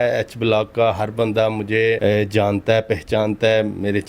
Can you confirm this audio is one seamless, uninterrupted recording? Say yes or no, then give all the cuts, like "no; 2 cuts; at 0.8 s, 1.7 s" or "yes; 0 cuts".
no; 1 cut; at 2.0 s